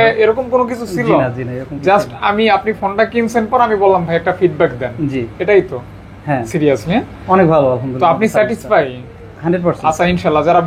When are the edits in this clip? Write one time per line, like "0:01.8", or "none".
none